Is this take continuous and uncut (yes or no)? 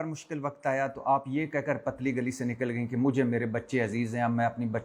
yes